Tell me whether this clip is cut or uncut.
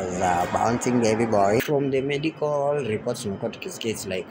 cut